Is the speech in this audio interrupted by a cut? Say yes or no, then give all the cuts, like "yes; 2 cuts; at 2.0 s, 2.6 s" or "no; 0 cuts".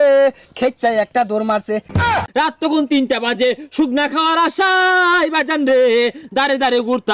yes; 1 cut; at 2.1 s